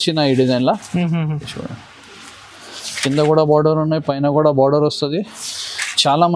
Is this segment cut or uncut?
uncut